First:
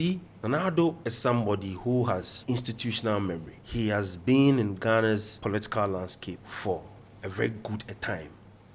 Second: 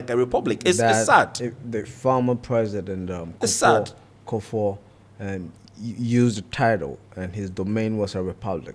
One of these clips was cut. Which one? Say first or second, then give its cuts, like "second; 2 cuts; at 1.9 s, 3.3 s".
first; 5 cuts; at 1.1 s, 2.3 s, 3.6 s, 5.3 s, 6.5 s